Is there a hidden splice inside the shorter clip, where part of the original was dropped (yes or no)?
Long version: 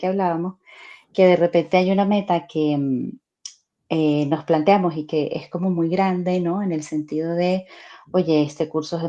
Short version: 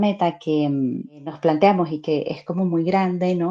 yes